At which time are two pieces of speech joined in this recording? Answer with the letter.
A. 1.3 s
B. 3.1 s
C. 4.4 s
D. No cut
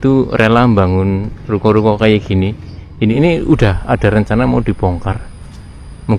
B